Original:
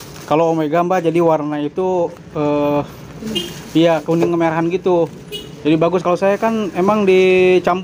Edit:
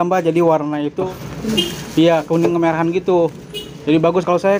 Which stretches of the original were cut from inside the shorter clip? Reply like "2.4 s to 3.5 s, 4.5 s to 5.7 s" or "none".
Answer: 1.9 s to 2.9 s